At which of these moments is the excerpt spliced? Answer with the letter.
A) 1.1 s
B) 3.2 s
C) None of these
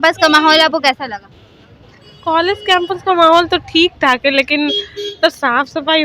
C